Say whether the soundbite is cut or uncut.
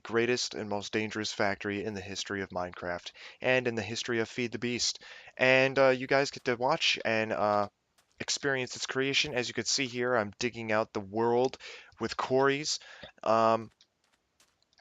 cut